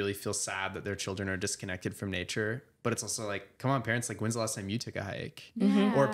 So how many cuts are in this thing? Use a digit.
0